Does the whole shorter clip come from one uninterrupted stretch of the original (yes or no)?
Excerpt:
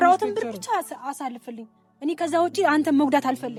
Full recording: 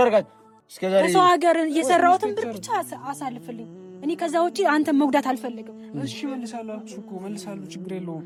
yes